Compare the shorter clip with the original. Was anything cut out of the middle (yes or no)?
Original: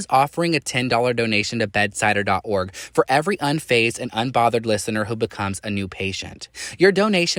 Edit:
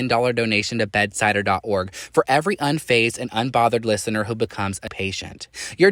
yes